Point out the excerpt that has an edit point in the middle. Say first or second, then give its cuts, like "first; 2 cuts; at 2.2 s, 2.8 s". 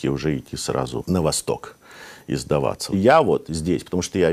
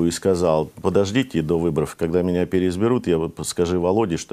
first; 2 cuts; at 1.0 s, 2.9 s